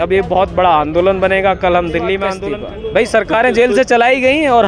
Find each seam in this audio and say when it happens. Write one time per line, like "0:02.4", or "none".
0:02.4

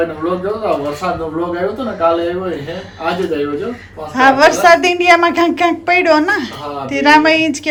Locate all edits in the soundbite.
none

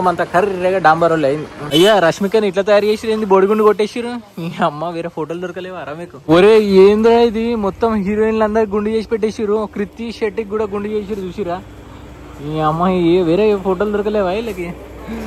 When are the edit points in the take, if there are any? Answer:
0:01.6
0:06.1

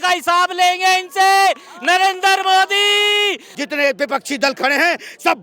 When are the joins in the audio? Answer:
0:03.5

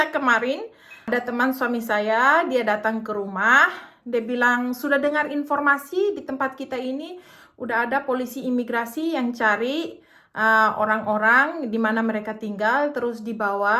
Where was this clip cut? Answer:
0:01.1

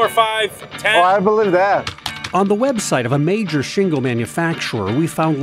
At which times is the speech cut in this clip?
0:01.9

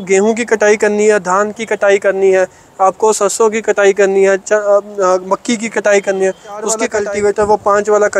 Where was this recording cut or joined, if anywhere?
0:06.8

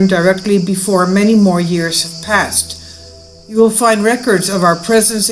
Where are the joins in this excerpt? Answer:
0:02.2

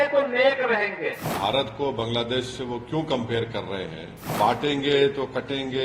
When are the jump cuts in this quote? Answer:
0:01.3
0:04.2

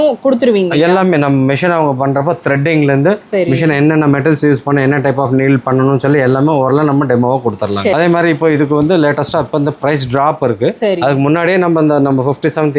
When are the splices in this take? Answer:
0:07.9

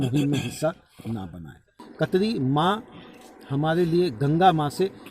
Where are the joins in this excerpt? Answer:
0:01.8

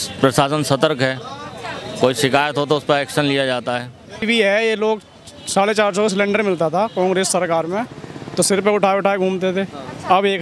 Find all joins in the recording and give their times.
0:04.2

